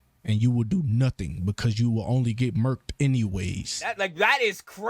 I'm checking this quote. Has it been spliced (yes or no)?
no